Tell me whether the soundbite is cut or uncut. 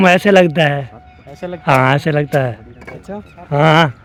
uncut